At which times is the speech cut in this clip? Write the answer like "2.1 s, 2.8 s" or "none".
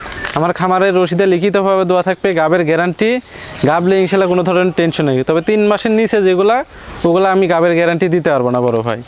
none